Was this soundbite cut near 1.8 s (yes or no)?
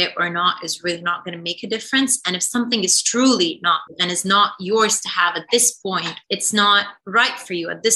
no